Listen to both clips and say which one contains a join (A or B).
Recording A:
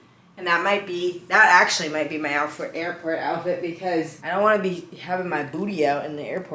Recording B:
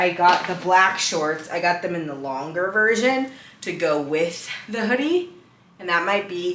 A